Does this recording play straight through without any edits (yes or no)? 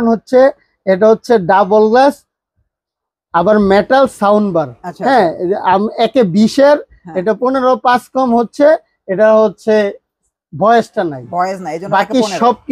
yes